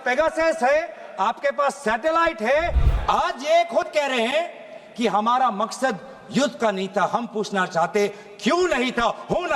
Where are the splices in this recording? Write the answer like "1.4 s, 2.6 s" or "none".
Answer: 2.8 s